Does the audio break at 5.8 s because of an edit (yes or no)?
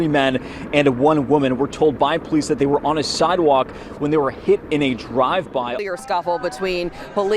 yes